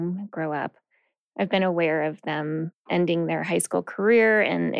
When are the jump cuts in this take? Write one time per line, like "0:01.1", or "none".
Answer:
0:01.2